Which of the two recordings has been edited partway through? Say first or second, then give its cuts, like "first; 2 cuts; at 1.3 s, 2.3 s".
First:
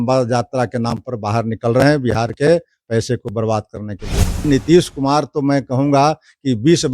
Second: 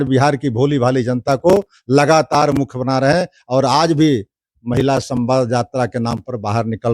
first; 1 cut; at 4.5 s